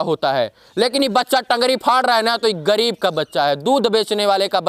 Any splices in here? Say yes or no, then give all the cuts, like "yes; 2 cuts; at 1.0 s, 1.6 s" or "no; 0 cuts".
no; 0 cuts